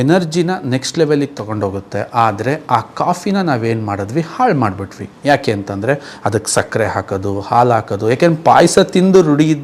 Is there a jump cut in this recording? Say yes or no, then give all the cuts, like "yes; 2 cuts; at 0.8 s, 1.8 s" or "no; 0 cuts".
no; 0 cuts